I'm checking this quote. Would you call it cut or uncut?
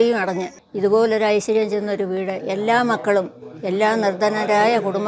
uncut